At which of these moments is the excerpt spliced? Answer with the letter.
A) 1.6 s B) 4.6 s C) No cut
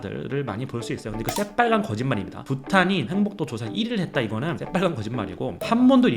B